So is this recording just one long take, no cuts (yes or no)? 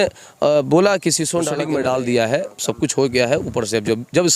no